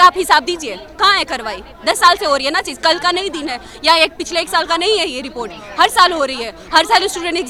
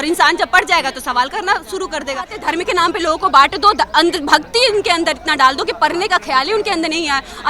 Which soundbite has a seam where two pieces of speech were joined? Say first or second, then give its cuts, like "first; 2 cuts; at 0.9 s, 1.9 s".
second; 1 cut; at 2.4 s